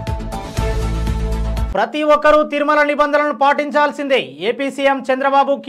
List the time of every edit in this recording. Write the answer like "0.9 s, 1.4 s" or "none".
1.7 s